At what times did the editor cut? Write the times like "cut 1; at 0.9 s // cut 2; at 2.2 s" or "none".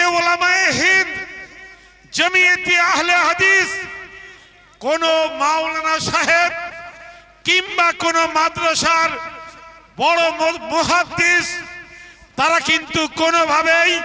none